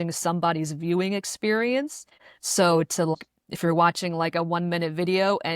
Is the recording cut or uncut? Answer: cut